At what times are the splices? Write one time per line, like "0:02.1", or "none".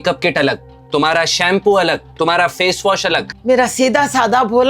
0:03.3

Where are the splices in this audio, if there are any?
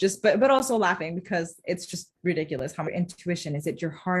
0:02.9

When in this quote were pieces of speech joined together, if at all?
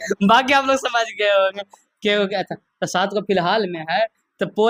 none

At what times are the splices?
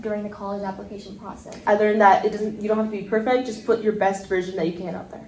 0:01.6

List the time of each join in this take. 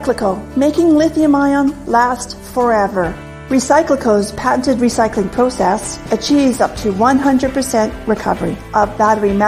0:02.2

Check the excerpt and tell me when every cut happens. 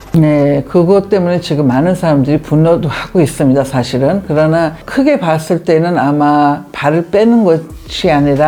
none

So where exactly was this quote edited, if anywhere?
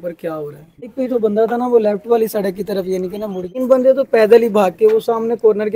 0:00.9
0:03.6

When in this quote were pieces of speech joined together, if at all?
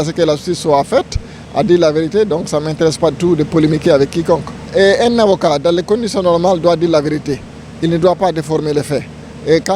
0:04.6

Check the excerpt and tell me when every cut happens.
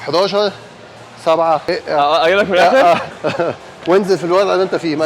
0:01.6
0:03.2

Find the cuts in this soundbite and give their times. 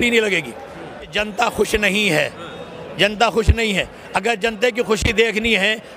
0:01.1

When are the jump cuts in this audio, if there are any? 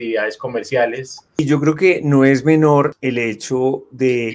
0:01.4
0:03.0

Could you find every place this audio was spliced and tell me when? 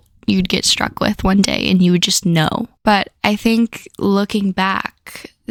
none

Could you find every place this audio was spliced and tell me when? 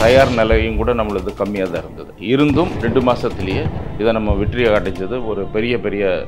none

